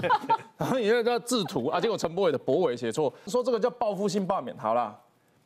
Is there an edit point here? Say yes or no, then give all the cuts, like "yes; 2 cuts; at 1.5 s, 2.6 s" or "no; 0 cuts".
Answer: yes; 1 cut; at 3.2 s